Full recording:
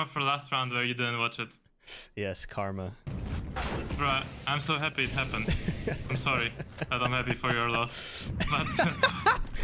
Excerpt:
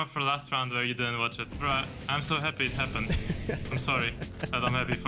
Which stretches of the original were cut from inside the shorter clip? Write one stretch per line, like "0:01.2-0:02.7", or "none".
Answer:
0:01.5-0:03.9